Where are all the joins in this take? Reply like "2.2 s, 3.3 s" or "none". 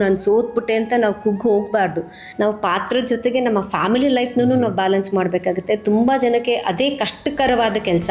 2.3 s